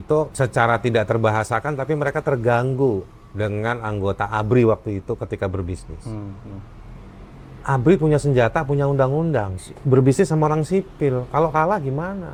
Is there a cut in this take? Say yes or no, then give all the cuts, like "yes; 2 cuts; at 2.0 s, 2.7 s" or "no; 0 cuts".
no; 0 cuts